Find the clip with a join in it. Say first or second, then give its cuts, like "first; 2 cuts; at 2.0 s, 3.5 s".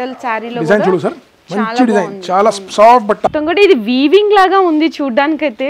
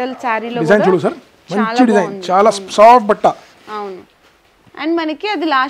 first; 1 cut; at 3.3 s